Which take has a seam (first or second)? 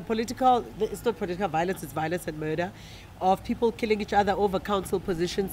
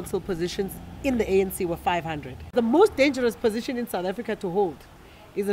second